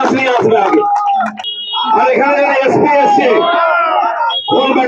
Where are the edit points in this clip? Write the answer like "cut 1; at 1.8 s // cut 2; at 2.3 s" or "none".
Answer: cut 1; at 1.4 s